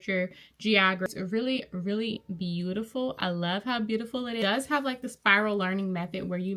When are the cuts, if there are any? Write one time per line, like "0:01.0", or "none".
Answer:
0:01.1
0:04.4

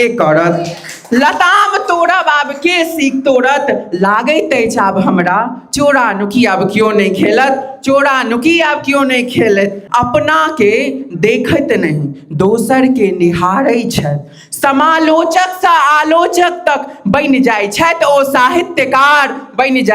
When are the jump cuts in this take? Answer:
0:09.8

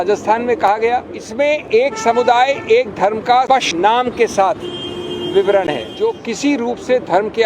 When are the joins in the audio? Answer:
0:01.2
0:03.6
0:05.9

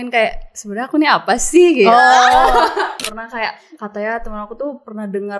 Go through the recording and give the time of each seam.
0:02.9

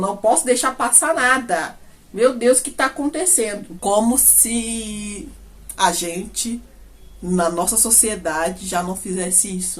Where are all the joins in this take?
0:03.7

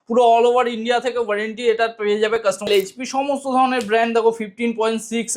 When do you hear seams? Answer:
0:02.7

